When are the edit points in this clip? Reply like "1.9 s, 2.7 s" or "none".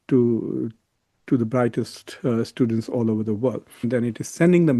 3.9 s